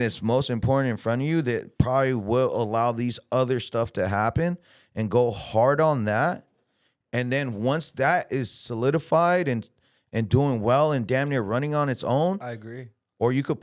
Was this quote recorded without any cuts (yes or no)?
yes